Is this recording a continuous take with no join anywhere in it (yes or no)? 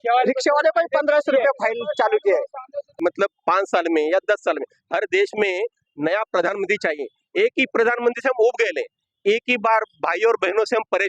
no